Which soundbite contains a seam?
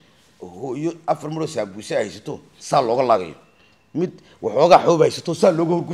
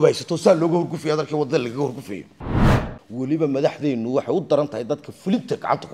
second; 1 cut; at 2.7 s

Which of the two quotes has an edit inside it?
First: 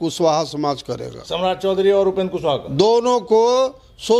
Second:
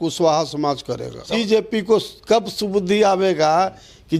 second; 1 cut; at 1.4 s

